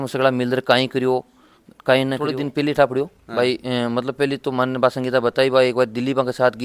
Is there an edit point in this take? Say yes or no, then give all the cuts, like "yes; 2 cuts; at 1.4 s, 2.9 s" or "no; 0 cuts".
yes; 1 cut; at 2.2 s